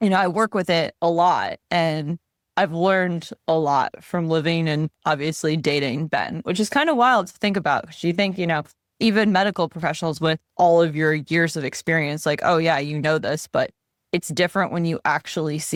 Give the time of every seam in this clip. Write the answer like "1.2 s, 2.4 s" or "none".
none